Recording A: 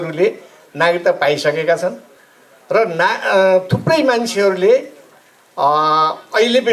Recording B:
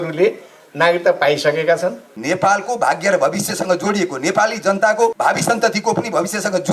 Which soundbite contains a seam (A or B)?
B